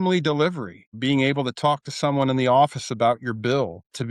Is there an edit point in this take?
no; 0 cuts

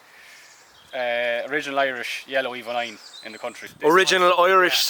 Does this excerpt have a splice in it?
yes; 1 cut; at 3.6 s

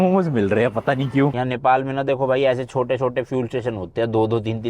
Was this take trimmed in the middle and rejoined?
yes; 1 cut; at 1.3 s

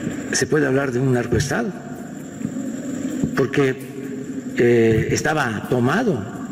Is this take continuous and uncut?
yes; 0 cuts

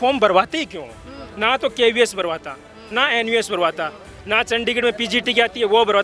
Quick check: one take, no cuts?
yes; 0 cuts

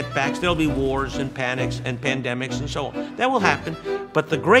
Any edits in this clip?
no; 0 cuts

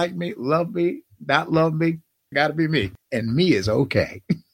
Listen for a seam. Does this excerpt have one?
yes; 2 cuts; at 2.3 s, 3.0 s

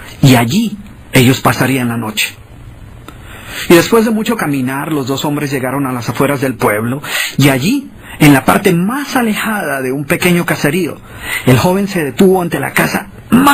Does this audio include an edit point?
yes; 1 cut; at 9.0 s

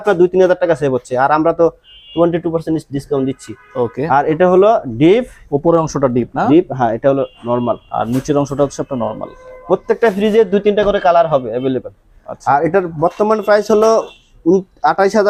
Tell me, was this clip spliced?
no; 0 cuts

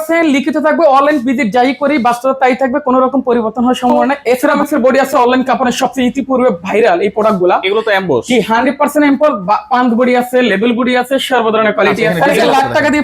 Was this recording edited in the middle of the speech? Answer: yes; 2 cuts; at 4.5 s, 12.1 s

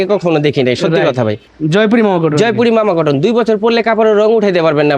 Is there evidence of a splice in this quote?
yes; 1 cut; at 1.5 s

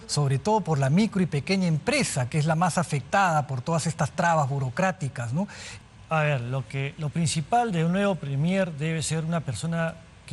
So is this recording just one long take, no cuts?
no; 1 cut; at 5.6 s

